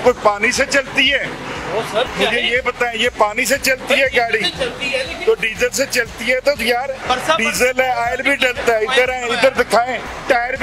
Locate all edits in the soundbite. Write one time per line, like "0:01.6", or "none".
none